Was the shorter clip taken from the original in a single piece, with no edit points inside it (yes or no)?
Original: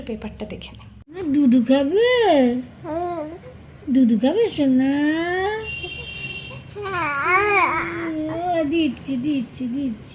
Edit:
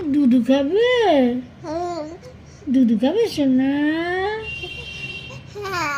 yes